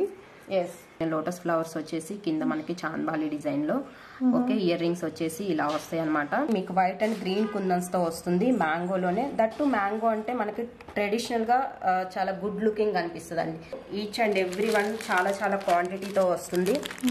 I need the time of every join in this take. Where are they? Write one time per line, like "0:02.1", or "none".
0:01.0
0:06.5
0:13.7

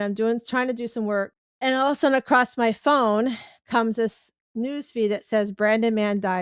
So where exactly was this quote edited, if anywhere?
0:01.4

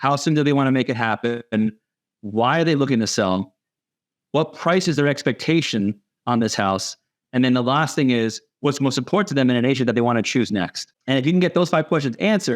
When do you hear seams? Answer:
none

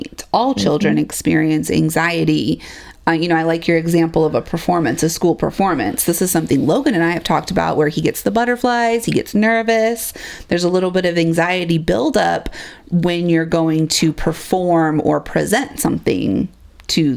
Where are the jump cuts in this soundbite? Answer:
none

